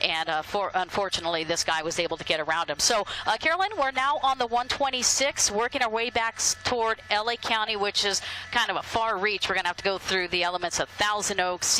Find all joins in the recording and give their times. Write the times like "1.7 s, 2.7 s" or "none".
none